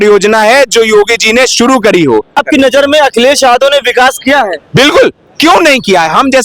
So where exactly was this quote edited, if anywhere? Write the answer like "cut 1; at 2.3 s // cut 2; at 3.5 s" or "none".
cut 1; at 2.4 s